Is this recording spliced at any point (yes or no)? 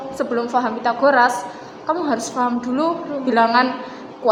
no